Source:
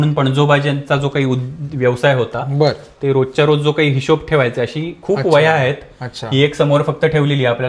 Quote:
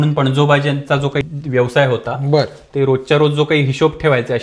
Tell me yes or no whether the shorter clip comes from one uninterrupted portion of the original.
no